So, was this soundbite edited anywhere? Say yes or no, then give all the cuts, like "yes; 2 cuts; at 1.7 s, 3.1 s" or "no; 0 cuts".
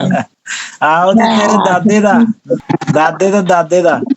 yes; 1 cut; at 2.6 s